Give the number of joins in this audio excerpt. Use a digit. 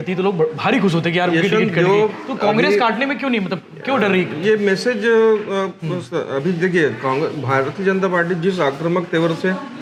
0